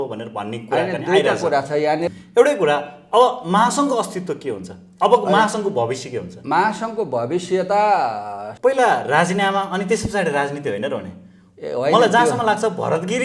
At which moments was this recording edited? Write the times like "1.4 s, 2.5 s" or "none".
2.1 s, 8.4 s